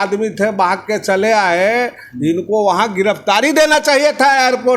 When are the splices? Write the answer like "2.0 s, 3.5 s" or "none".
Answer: none